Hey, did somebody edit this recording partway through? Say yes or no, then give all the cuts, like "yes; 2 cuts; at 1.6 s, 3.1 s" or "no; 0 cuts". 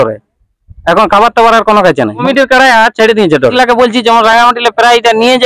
yes; 2 cuts; at 2.3 s, 3.5 s